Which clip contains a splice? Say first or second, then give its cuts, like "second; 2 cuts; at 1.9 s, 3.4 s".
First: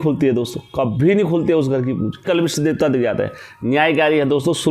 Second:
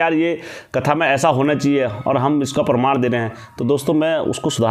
first; 1 cut; at 2.3 s